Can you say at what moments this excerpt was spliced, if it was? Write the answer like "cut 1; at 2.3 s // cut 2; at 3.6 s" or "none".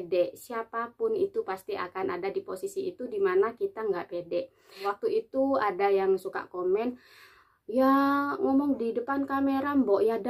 cut 1; at 4.9 s